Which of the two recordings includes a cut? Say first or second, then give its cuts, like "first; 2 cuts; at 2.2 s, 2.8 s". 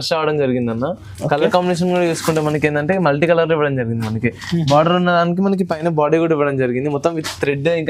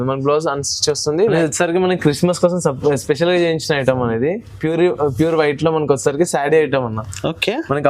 second; 1 cut; at 1.3 s